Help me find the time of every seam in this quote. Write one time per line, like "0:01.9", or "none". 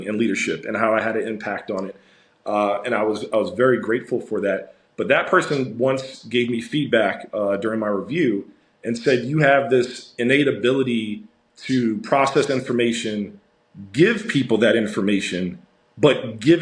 none